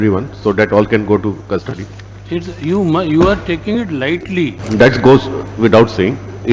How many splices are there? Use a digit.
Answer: 1